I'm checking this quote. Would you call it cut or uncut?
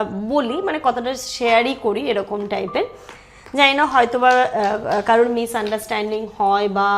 uncut